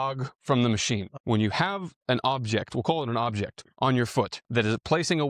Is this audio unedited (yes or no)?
no